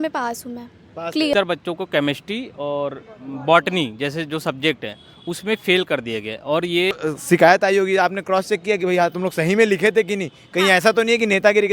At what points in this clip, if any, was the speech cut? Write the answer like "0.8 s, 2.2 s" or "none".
1.3 s, 6.9 s